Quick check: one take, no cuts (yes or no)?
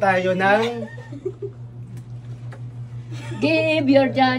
yes